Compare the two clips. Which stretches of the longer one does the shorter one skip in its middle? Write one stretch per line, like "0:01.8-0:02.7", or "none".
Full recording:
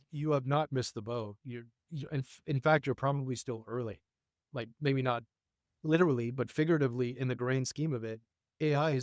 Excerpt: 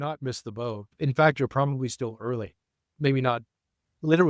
0:01.4-0:02.3
0:04.4-0:04.7